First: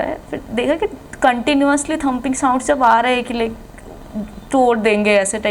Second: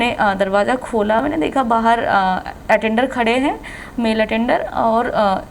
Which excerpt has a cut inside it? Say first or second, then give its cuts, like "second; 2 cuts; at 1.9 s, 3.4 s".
second; 1 cut; at 1.2 s